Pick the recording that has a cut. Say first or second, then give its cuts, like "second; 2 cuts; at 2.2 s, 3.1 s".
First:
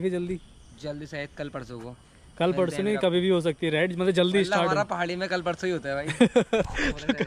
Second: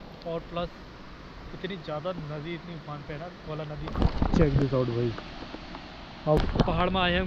second; 1 cut; at 6.4 s